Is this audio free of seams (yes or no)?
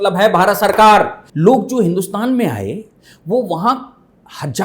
no